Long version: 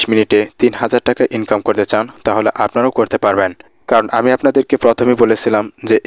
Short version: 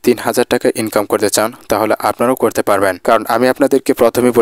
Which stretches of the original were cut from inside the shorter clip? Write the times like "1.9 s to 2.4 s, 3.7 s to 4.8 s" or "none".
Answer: 3.5 s to 3.8 s

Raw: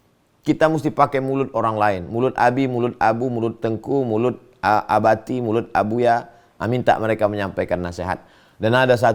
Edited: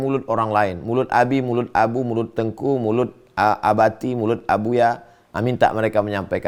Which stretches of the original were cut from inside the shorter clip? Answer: none

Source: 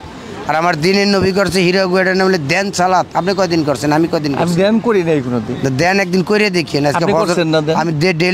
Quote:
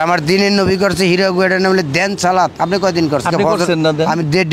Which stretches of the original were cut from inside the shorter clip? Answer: 3.8 s to 6.9 s

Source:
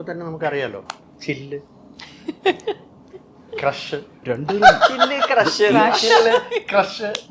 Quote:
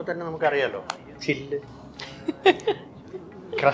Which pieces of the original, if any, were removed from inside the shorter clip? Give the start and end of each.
none

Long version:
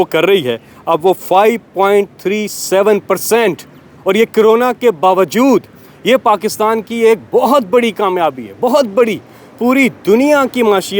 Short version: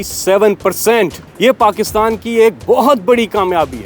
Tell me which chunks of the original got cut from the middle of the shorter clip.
3.7 s to 5.9 s

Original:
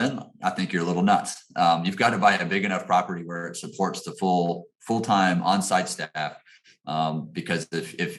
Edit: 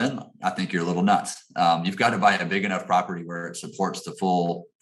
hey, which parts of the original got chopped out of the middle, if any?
none

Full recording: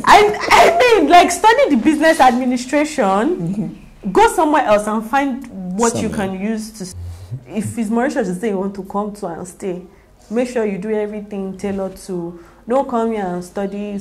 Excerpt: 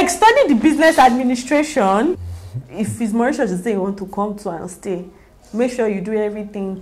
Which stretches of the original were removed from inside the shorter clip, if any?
3.4 s to 7.0 s

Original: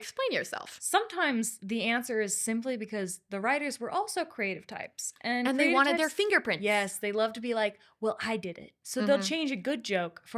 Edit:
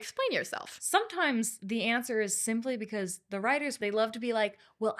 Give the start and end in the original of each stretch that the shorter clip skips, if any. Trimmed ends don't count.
3.7 s to 7.0 s

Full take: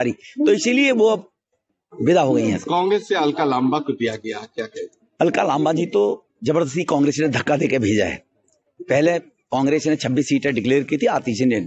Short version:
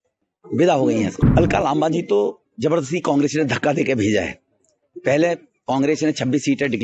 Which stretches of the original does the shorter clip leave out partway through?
2.6 s to 5.0 s

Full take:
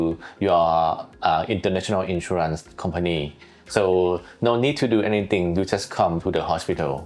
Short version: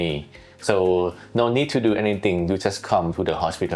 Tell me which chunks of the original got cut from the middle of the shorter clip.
none

